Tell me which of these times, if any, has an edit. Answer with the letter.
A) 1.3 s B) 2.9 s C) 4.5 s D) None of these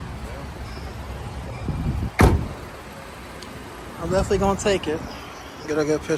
D